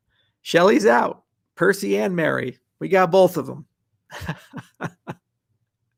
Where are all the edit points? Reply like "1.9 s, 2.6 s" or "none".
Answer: none